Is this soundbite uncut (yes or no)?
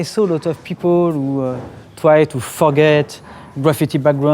yes